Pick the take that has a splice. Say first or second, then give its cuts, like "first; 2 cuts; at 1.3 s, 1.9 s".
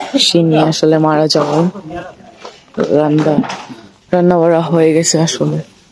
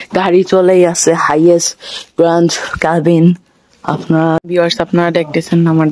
second; 1 cut; at 4.4 s